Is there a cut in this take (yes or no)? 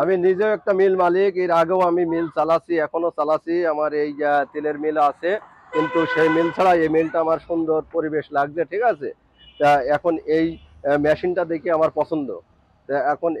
no